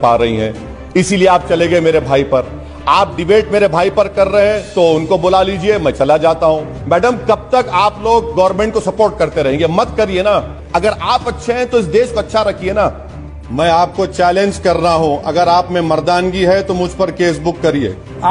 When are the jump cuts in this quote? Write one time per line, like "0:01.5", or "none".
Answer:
0:06.7
0:10.6
0:13.4